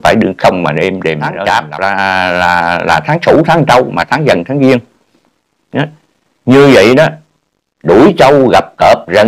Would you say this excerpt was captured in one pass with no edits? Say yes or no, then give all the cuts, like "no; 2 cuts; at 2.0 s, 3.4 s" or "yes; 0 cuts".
no; 1 cut; at 1.3 s